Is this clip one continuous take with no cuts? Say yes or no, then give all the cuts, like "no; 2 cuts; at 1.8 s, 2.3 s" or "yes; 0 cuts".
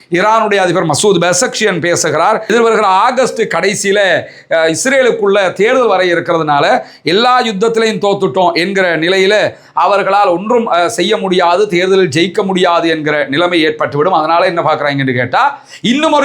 no; 1 cut; at 2.5 s